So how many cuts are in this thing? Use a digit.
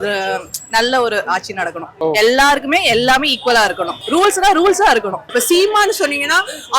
3